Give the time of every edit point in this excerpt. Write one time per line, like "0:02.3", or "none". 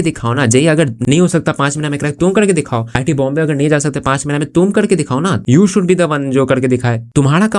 0:01.0